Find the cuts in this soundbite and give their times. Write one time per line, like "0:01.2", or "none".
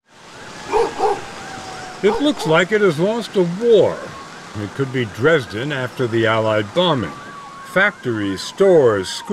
none